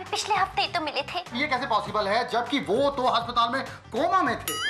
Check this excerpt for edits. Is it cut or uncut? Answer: cut